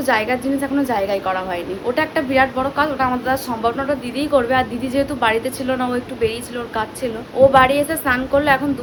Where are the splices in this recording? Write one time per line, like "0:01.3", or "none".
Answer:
none